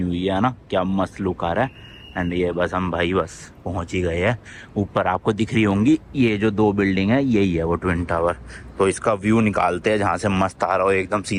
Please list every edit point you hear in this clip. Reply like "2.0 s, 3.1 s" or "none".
none

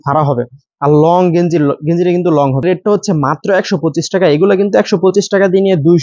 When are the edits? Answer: 2.6 s

